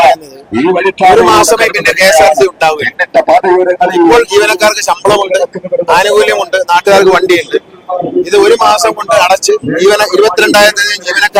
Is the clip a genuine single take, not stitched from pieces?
yes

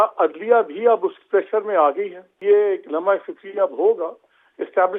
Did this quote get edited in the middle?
yes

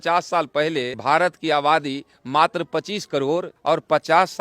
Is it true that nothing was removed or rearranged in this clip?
no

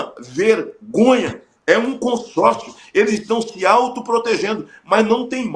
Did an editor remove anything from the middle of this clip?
no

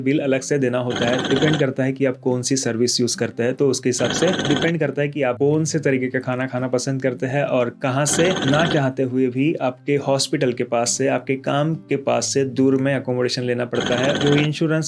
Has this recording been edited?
yes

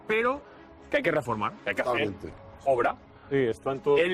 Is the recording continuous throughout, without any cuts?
yes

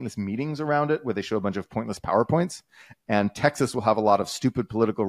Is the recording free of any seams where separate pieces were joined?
yes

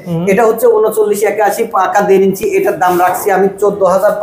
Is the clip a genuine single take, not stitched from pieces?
yes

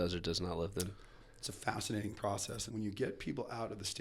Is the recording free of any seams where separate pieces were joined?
no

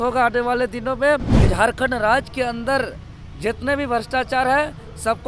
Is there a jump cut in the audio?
yes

